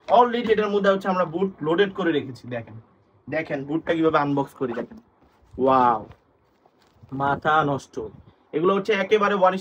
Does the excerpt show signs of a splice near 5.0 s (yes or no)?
no